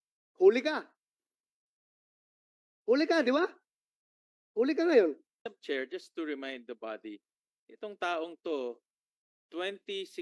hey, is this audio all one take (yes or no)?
no